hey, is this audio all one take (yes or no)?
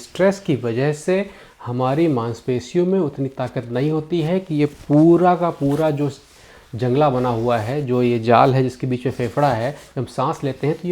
yes